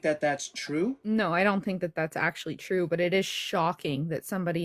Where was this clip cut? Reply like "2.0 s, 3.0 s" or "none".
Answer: 1.0 s